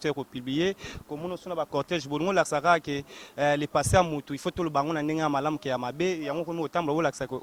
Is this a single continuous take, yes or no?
yes